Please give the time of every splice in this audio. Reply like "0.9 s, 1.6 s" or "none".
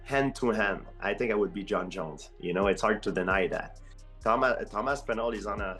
3.8 s